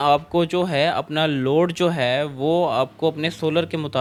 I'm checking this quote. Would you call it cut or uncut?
uncut